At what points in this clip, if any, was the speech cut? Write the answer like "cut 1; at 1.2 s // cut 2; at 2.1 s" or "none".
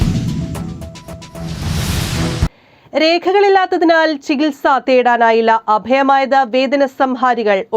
cut 1; at 1.3 s